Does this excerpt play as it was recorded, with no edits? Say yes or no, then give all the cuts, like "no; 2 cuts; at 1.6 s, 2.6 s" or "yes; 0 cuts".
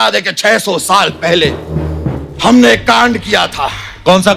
yes; 0 cuts